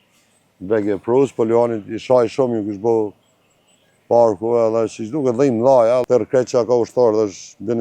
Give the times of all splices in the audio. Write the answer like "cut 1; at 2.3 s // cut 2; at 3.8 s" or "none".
cut 1; at 6.0 s